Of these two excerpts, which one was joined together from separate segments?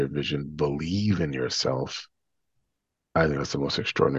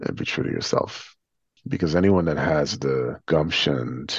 second; 1 cut; at 3.2 s

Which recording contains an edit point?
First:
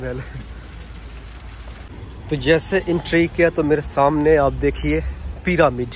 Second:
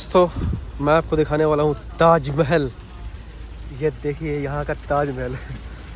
first; 1 cut; at 1.9 s

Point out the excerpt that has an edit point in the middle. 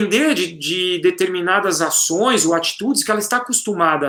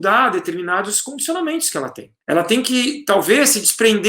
second; 1 cut; at 2.1 s

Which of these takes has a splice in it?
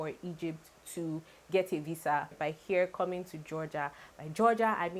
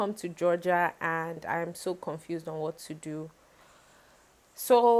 first; 1 cut; at 2.3 s

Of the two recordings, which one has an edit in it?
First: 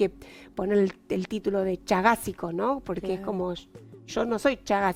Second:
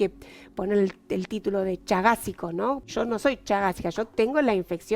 second; 1 cut; at 2.9 s

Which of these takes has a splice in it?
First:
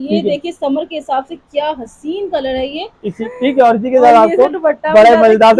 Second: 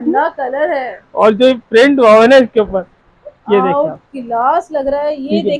first; 1 cut; at 3.2 s

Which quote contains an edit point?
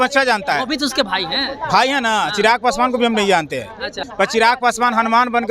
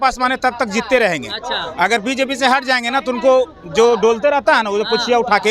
first; 1 cut; at 4.0 s

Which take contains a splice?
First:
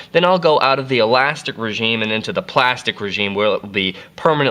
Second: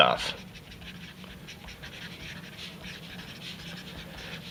first; 1 cut; at 1.1 s

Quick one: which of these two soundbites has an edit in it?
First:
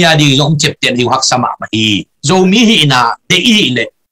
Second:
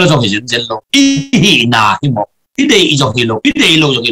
first; 1 cut; at 2.1 s

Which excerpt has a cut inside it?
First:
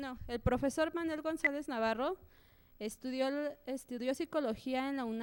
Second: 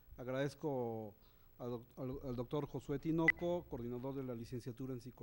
second; 1 cut; at 1.4 s

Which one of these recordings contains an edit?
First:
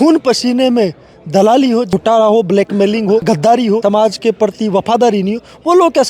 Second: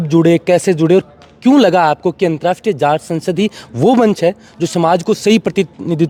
first; 2 cuts; at 1.9 s, 3.8 s

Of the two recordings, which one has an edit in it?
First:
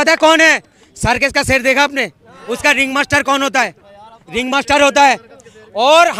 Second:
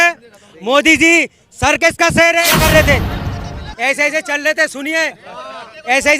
second; 1 cut; at 2.4 s

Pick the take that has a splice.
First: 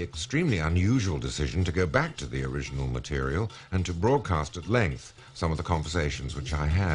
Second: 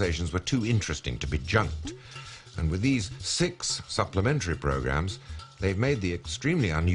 first; 1 cut; at 2.4 s

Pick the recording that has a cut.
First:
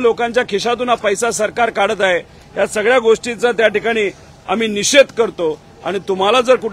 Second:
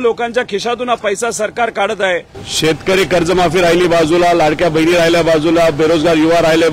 second; 1 cut; at 2.4 s

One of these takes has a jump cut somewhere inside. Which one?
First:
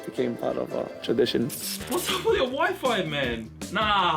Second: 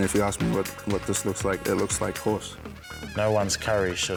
first; 1 cut; at 1.6 s

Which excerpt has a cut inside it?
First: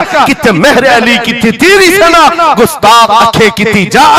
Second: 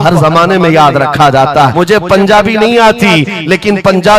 second; 1 cut; at 1.7 s

